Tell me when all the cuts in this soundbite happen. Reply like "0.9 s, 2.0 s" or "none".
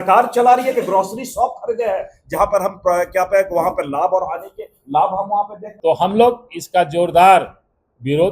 5.6 s